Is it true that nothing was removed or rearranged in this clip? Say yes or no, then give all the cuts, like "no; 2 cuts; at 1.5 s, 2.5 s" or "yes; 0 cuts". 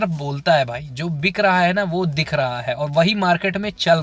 yes; 0 cuts